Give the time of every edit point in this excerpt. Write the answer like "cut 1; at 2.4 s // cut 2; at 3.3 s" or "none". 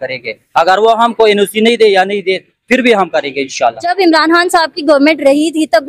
cut 1; at 3.8 s